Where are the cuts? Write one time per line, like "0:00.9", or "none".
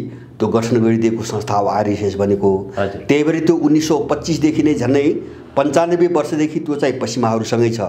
none